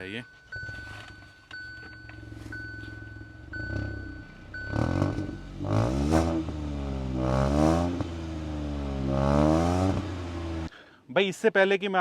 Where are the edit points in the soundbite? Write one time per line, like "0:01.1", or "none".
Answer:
0:10.6